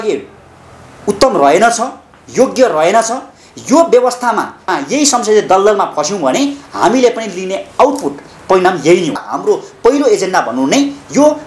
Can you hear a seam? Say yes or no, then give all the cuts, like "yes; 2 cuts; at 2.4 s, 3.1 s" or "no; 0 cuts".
yes; 2 cuts; at 4.5 s, 9.2 s